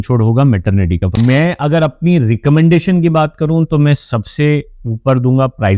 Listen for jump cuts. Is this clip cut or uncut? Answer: cut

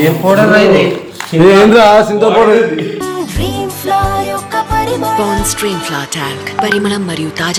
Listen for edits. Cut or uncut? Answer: uncut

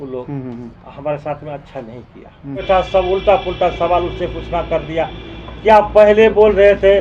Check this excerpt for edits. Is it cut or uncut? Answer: cut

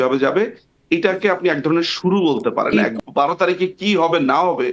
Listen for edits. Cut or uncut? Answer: cut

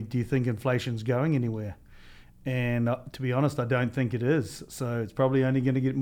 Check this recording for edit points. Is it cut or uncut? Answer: uncut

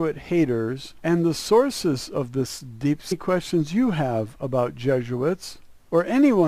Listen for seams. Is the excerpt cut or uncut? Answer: uncut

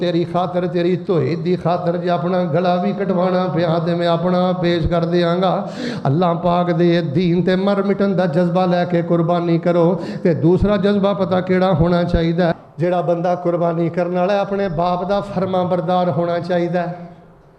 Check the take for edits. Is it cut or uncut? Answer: cut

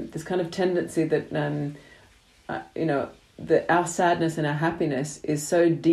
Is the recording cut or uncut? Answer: uncut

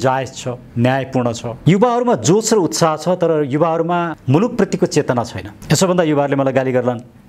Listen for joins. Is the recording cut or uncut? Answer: cut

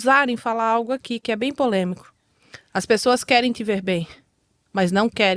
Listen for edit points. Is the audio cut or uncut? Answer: uncut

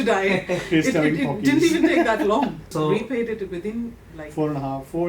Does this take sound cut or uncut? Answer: cut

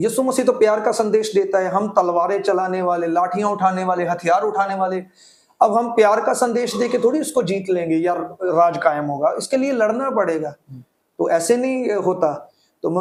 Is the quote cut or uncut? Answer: uncut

